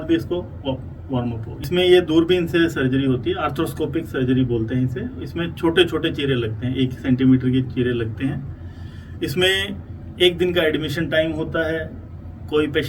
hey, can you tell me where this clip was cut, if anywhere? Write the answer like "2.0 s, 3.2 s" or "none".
1.5 s